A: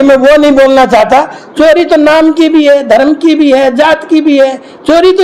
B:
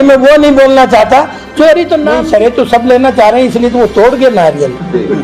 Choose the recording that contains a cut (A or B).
B